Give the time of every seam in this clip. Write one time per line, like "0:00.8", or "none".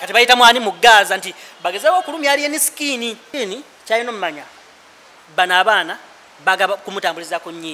0:03.3